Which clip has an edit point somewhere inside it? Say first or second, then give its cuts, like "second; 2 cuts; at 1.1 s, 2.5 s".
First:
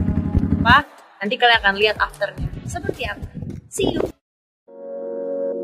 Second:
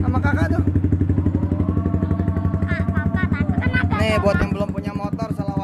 first; 2 cuts; at 0.7 s, 4.2 s